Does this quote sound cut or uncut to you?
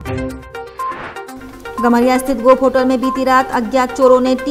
uncut